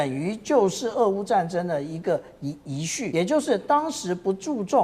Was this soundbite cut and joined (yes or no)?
yes